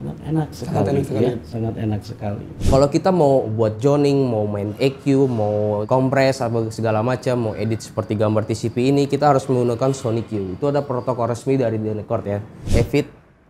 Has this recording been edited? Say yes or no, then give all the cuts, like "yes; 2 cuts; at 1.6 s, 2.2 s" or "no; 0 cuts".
yes; 2 cuts; at 2.6 s, 12.7 s